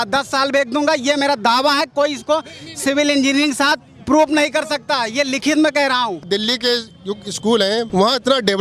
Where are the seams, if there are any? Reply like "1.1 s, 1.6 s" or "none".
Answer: 6.3 s, 7.9 s